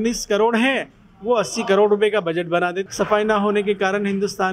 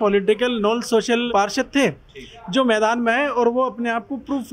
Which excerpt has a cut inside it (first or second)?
first